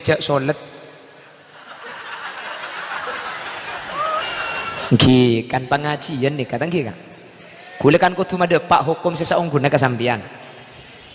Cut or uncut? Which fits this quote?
cut